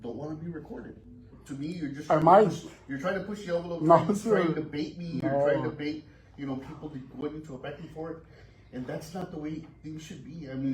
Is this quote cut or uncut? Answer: cut